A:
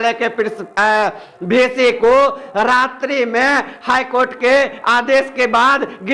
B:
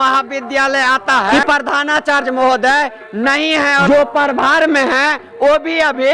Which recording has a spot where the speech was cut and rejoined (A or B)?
B